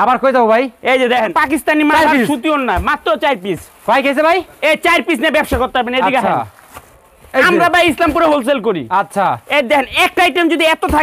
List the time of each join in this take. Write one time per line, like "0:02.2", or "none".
0:01.3